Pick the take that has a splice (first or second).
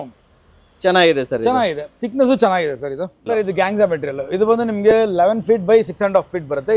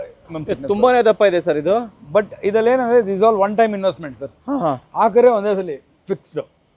first